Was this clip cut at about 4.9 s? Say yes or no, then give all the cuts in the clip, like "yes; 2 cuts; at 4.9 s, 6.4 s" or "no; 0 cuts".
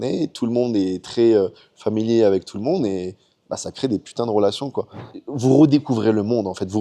yes; 1 cut; at 4.9 s